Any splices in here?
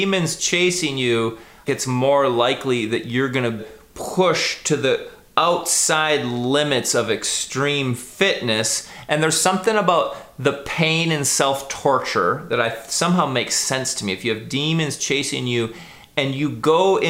yes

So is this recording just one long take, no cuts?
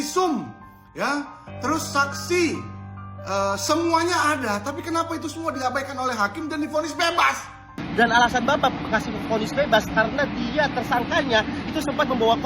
no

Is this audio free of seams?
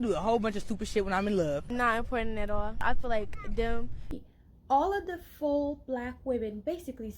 no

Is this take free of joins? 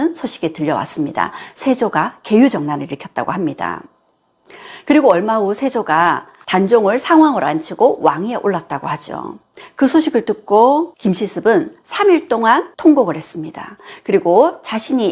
no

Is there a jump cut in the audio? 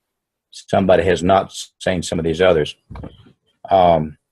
yes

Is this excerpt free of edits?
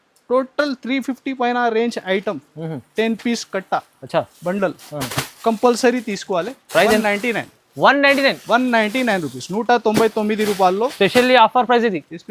yes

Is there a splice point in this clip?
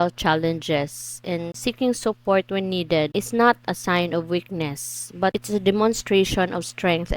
yes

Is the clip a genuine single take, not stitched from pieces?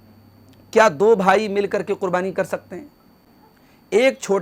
yes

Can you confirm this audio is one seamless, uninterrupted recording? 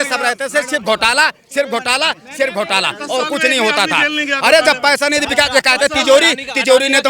yes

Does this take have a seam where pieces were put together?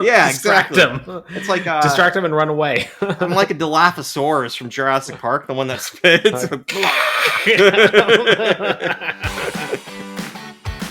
yes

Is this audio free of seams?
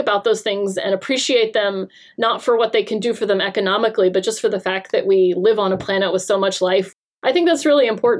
no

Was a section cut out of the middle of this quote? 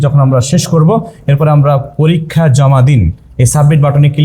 no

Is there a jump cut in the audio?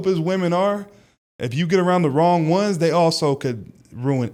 no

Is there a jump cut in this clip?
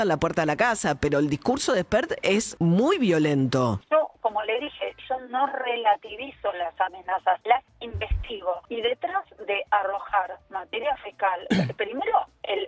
yes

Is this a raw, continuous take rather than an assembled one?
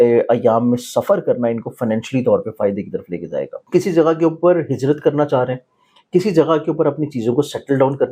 no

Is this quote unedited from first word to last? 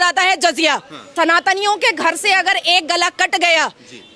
no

